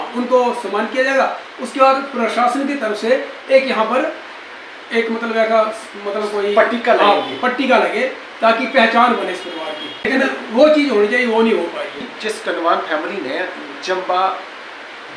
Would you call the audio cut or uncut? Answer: cut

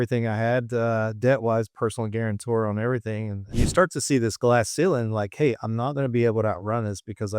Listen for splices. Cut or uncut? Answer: cut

